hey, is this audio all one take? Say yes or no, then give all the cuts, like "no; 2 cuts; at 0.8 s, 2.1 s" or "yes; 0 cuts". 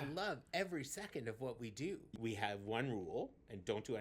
no; 1 cut; at 2.1 s